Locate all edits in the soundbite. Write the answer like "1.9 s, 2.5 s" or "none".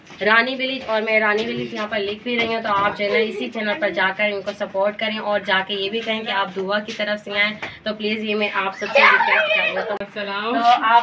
10.0 s